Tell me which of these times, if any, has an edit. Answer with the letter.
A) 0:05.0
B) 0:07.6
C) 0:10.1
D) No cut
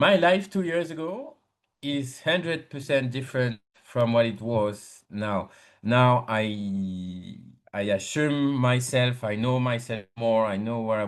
D